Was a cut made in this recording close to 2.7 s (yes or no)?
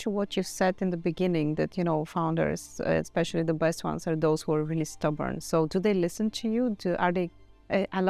no